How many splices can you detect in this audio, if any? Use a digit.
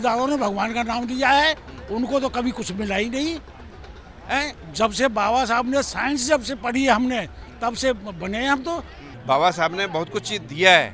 1